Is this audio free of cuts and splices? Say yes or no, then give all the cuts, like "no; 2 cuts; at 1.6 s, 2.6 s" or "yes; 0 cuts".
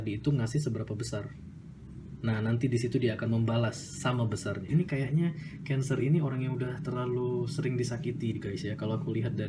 no; 1 cut; at 4.7 s